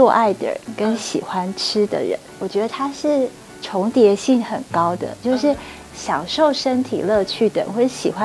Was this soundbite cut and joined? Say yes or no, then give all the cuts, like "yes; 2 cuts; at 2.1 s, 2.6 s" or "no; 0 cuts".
yes; 1 cut; at 2.3 s